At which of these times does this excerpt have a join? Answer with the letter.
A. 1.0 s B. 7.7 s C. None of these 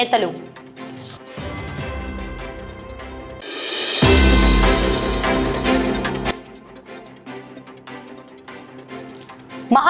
C